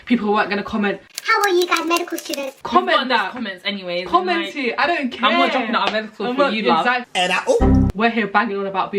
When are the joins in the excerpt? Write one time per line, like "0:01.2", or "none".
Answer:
0:07.9